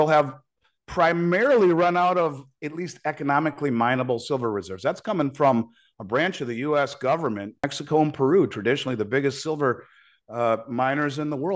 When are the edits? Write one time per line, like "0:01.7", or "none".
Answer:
0:07.7

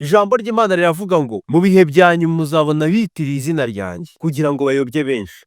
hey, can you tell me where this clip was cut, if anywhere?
0:01.4
0:04.0

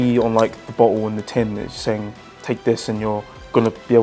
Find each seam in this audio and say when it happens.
none

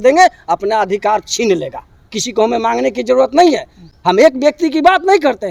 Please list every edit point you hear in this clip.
none

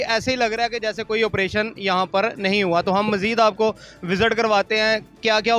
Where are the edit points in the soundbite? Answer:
none

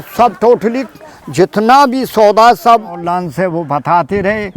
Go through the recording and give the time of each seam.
0:03.0

